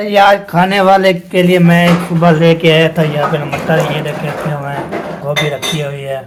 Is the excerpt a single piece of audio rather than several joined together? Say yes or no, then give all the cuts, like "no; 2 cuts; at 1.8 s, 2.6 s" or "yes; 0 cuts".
yes; 0 cuts